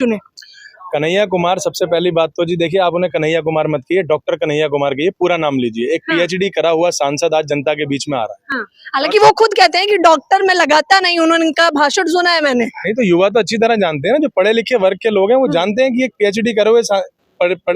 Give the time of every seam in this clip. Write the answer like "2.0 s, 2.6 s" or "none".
none

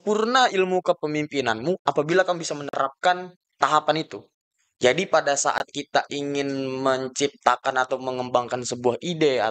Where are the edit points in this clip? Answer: 4.4 s

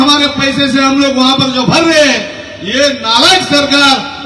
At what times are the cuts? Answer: none

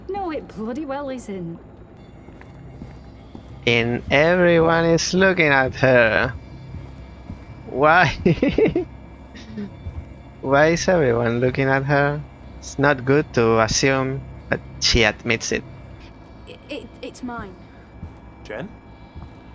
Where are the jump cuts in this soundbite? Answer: 2.0 s, 16.0 s, 17.9 s

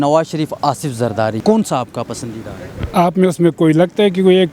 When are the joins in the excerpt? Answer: 1.4 s

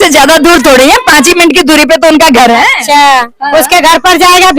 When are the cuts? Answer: none

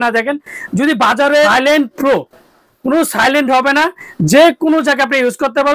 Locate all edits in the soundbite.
1.5 s

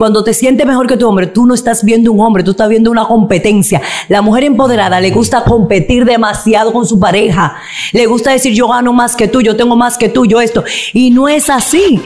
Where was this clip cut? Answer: none

